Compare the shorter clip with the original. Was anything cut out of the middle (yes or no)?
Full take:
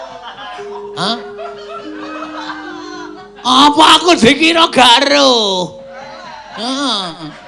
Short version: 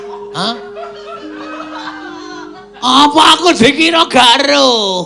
no